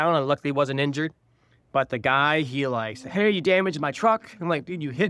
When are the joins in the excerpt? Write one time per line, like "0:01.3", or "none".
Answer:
none